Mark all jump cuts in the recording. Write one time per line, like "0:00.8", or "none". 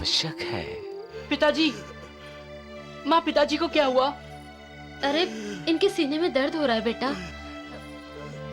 0:01.2